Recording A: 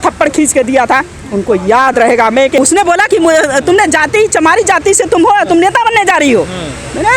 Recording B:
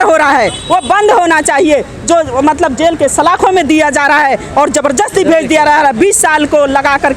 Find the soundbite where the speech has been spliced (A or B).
A